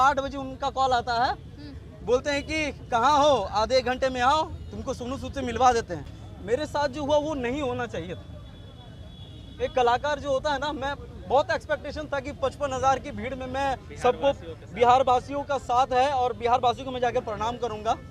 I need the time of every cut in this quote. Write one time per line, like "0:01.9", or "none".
0:05.9